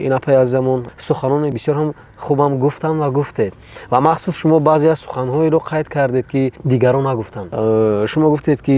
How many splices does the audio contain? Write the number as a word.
three